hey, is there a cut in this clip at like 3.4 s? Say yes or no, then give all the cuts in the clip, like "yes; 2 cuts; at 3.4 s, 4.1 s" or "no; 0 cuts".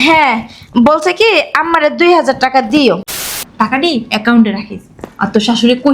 yes; 1 cut; at 3.4 s